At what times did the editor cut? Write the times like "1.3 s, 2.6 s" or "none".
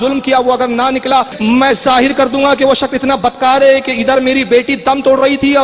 1.3 s